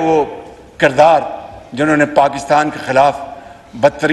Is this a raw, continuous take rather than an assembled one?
yes; 0 cuts

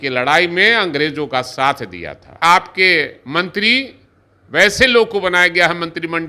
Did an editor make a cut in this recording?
yes; 1 cut; at 2.4 s

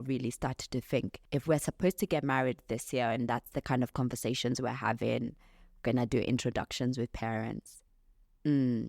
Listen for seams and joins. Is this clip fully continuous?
no; 1 cut; at 1.2 s

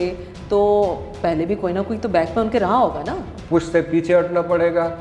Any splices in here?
yes; 1 cut; at 3.3 s

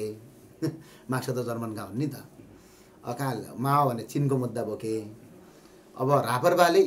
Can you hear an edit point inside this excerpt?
no; 0 cuts

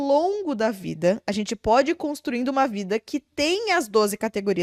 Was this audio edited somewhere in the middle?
no; 0 cuts

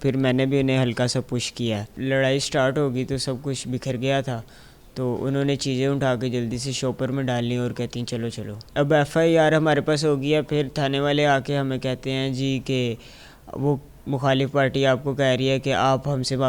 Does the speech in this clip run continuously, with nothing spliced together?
no; 2 cuts; at 1.9 s, 8.6 s

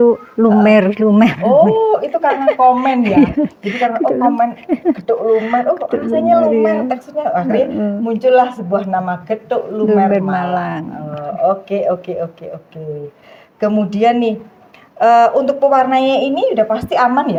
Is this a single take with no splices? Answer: yes; 0 cuts

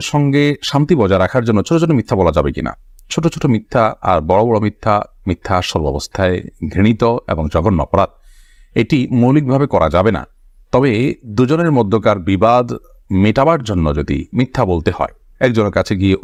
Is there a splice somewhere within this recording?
no; 0 cuts

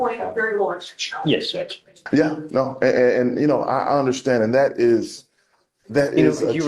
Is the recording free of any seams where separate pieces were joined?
no; 1 cut; at 2.0 s

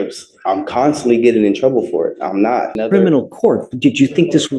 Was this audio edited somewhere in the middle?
yes; 1 cut; at 2.8 s

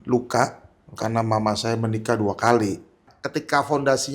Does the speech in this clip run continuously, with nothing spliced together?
no; 1 cut; at 3.1 s

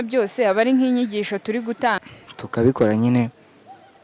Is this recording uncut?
no; 1 cut; at 2.0 s

